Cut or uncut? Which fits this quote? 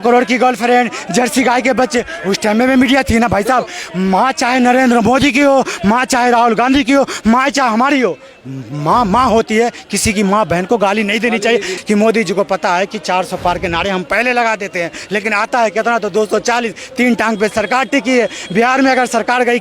cut